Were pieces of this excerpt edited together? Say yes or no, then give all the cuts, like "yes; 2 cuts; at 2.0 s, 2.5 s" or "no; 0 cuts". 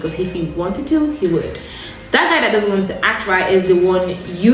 no; 0 cuts